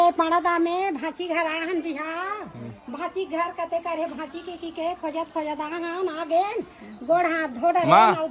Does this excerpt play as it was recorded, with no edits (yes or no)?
yes